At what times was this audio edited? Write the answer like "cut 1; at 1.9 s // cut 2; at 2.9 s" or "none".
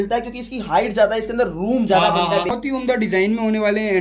cut 1; at 2.6 s